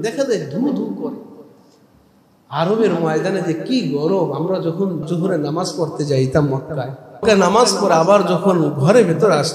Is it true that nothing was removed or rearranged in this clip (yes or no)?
no